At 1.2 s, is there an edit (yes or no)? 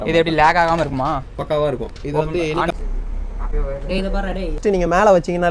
no